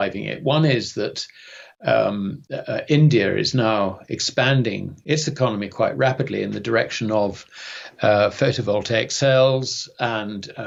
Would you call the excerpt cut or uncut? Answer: uncut